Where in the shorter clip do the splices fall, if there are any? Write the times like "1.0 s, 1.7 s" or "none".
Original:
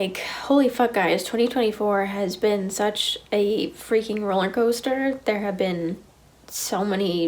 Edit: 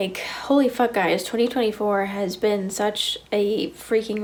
none

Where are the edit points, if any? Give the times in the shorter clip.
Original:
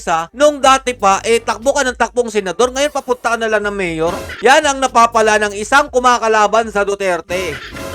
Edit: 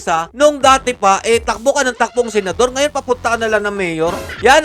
none

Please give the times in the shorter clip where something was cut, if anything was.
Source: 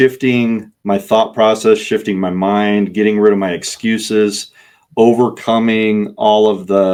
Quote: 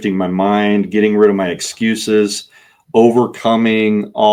none

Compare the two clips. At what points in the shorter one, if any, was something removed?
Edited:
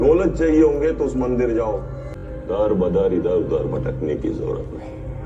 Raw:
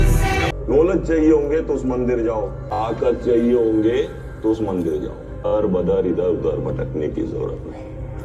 2.1 s

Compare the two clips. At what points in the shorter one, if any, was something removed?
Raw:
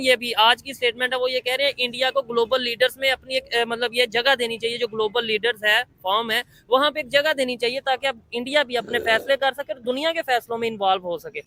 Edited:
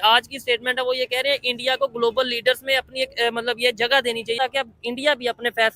4.4 s

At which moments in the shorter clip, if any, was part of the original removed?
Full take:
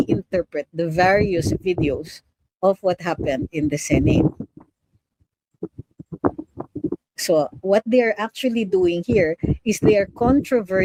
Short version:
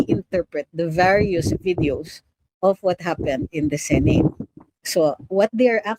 4.7 s

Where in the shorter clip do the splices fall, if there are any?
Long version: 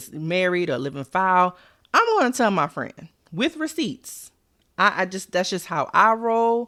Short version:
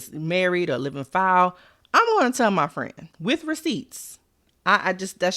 3.0 s

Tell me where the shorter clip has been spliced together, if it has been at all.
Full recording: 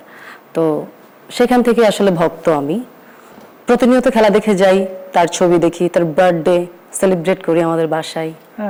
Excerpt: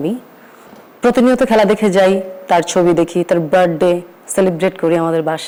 none

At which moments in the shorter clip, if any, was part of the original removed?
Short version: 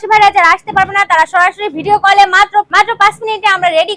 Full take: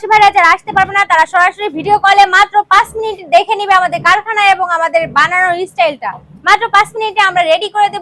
2.7 s

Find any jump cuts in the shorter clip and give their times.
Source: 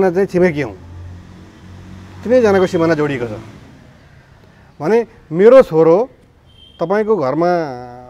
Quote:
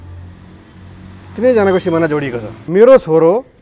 2.6 s

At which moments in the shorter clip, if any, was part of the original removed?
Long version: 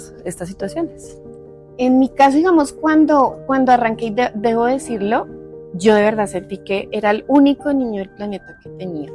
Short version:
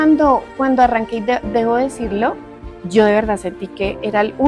none

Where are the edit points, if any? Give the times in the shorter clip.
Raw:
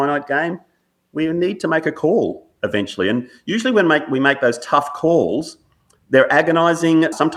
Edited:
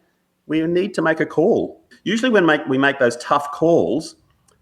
1.9 s

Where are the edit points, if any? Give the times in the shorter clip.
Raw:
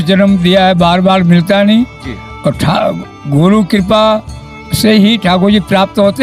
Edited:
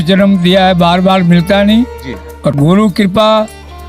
2.6 s

